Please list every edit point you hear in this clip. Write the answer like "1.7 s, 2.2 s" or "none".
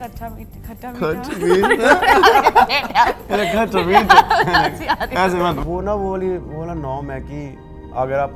5.6 s